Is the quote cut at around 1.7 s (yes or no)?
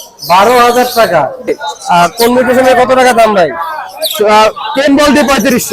yes